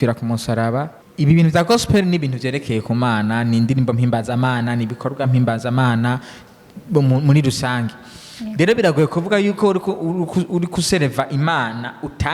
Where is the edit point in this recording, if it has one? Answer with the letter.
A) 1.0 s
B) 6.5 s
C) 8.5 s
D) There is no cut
A